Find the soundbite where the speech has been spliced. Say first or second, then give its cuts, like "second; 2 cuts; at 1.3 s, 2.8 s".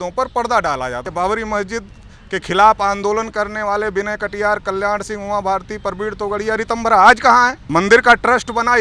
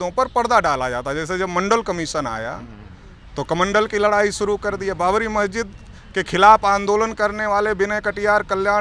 first; 2 cuts; at 1.1 s, 7.6 s